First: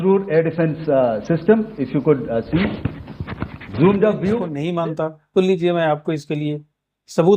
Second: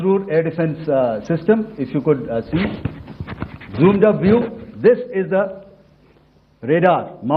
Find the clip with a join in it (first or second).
first